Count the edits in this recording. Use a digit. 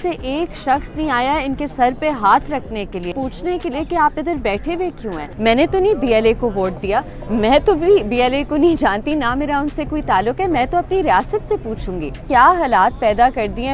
3